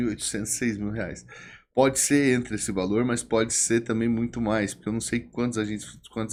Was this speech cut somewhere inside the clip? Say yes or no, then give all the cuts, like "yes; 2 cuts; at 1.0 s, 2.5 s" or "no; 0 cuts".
no; 0 cuts